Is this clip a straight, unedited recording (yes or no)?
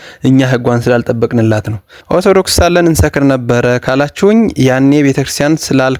no